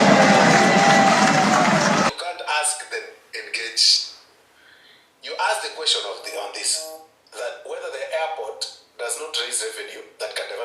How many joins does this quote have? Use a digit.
1